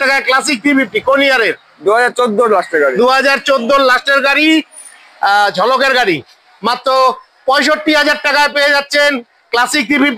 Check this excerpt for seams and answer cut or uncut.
uncut